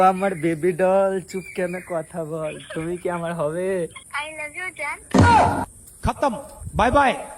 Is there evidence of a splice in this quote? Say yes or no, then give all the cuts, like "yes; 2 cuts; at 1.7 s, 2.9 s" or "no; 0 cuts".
yes; 1 cut; at 4.0 s